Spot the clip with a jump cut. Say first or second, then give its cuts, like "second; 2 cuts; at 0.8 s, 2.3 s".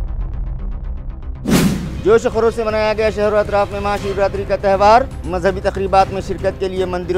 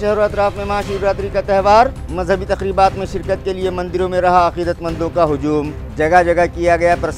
first; 1 cut; at 1.9 s